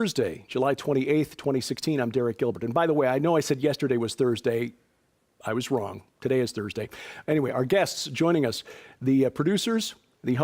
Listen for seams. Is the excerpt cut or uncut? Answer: cut